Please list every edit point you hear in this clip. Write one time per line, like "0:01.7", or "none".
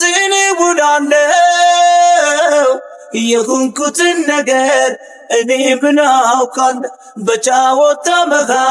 none